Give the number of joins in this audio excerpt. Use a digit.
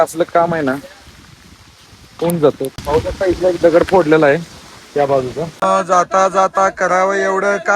2